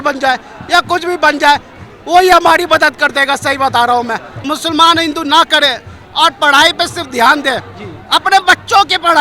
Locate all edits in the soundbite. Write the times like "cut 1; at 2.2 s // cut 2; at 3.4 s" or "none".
cut 1; at 4.5 s